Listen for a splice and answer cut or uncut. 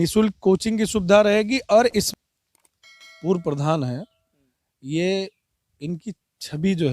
cut